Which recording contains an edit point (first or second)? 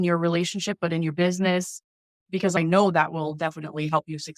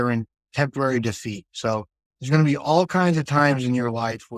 first